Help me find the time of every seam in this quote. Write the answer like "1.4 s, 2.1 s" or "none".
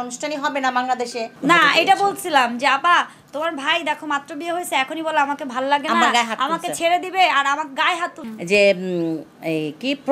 1.3 s, 8.2 s